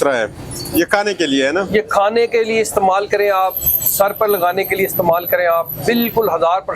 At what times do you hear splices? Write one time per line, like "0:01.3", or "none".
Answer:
none

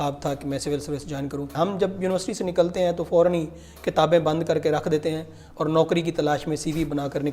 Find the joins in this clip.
0:01.5

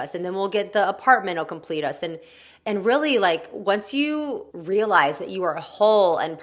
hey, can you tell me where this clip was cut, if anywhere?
0:04.5

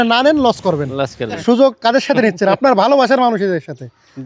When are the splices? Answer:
0:01.4

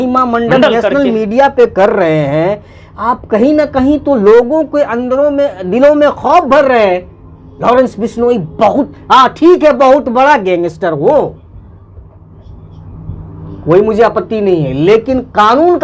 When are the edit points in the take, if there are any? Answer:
none

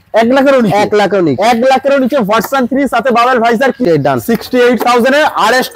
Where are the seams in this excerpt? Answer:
0:03.8

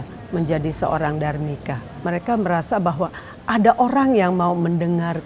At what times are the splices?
0:02.1

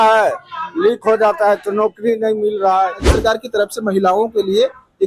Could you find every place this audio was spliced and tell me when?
0:03.1

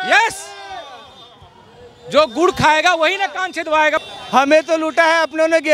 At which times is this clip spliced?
0:04.0

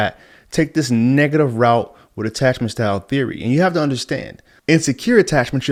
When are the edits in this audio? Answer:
none

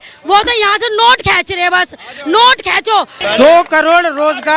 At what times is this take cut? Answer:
0:03.2

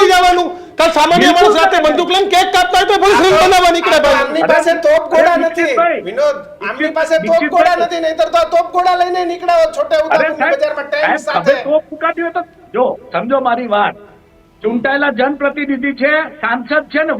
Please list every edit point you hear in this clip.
none

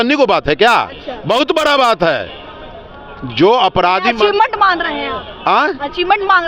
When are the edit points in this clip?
none

